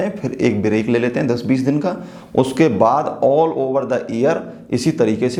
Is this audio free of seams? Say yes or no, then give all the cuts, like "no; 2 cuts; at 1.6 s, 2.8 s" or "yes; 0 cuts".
yes; 0 cuts